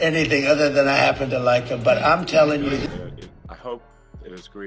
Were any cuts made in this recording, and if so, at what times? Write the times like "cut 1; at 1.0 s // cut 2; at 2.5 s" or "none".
cut 1; at 3.0 s